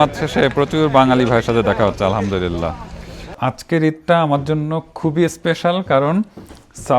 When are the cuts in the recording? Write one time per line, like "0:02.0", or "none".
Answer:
0:03.4